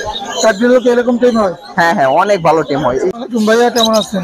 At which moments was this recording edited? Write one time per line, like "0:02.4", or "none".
0:03.1

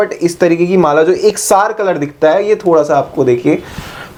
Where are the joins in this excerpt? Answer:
none

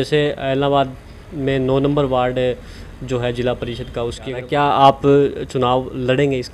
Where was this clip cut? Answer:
0:04.2

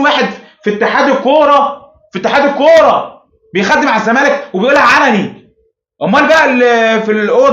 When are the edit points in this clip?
none

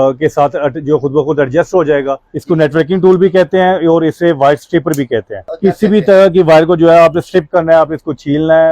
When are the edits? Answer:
0:02.3
0:05.4

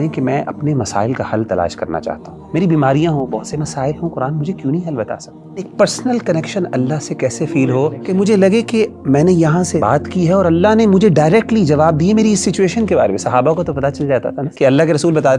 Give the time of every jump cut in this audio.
0:02.3
0:05.7
0:08.0
0:09.8
0:14.4

